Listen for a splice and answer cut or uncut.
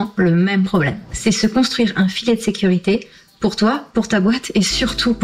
cut